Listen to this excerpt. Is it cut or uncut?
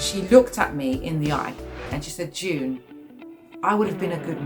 cut